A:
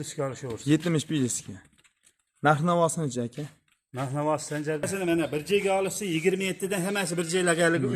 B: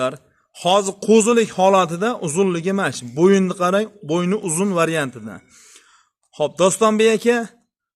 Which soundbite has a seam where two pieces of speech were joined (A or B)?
A